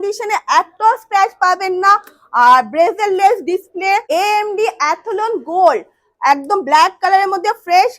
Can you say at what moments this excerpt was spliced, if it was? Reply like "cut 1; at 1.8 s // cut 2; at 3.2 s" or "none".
cut 1; at 4.0 s